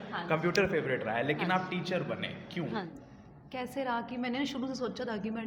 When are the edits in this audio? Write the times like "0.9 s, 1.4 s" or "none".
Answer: 3.0 s